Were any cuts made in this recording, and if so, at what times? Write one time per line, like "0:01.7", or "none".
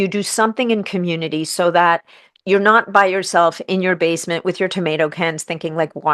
none